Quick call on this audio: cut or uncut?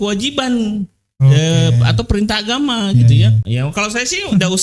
cut